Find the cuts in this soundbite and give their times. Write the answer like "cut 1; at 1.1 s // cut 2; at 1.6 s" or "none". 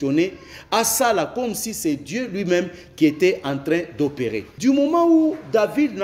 cut 1; at 4.4 s